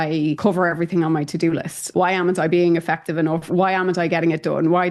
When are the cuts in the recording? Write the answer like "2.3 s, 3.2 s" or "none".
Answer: 3.4 s

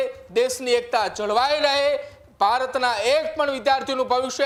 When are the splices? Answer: none

